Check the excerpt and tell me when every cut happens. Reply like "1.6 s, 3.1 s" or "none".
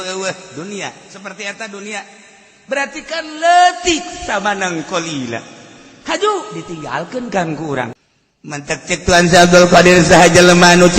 7.9 s